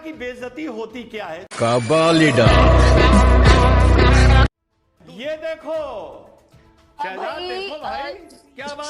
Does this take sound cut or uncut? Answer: cut